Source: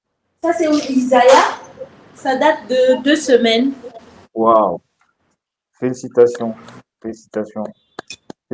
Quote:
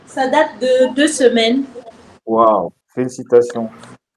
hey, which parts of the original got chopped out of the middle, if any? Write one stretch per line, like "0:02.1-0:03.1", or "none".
0:04.9-0:05.7